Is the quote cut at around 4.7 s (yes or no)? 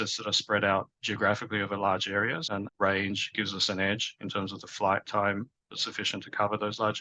no